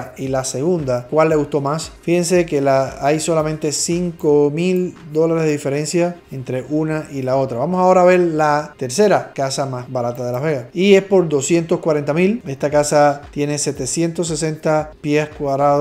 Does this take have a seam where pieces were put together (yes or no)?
no